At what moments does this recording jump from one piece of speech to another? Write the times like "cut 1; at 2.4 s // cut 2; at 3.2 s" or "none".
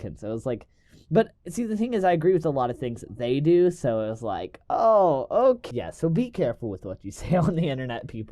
cut 1; at 5.7 s